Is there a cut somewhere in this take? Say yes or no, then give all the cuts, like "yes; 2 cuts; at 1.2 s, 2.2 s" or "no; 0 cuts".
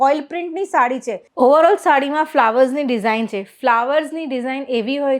yes; 1 cut; at 1.2 s